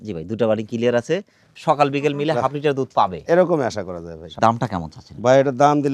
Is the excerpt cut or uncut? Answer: uncut